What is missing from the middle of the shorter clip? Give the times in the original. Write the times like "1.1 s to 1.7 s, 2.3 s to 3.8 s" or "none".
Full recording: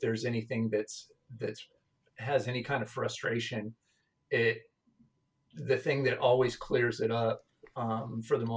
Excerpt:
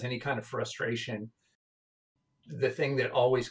4.1 s to 4.7 s